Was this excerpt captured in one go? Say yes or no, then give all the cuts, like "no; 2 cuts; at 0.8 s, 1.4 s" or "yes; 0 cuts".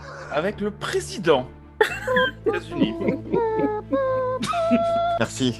yes; 0 cuts